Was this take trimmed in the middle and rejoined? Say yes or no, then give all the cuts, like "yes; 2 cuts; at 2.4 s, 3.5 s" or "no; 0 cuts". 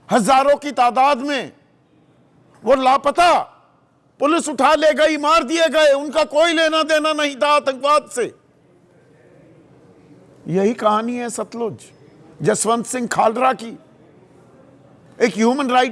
no; 0 cuts